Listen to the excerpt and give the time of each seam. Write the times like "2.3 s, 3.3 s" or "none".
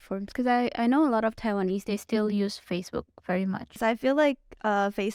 3.8 s